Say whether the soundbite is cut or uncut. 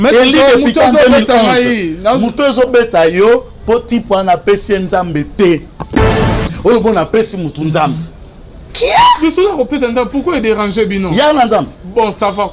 cut